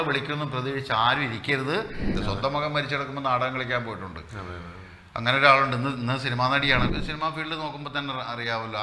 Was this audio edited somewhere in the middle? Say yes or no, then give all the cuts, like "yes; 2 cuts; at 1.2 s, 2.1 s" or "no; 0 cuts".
yes; 2 cuts; at 2.1 s, 6.9 s